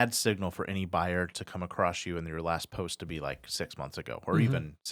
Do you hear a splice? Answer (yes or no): no